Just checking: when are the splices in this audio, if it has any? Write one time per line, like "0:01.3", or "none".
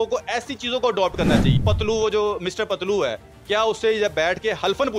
0:01.5